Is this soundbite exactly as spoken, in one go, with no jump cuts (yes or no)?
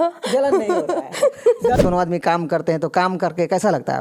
no